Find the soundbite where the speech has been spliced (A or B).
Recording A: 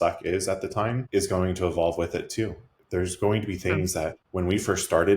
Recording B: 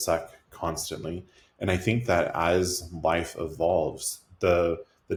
A